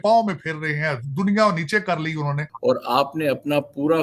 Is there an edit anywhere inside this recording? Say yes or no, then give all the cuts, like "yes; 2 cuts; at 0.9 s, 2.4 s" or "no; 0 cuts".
yes; 1 cut; at 2.5 s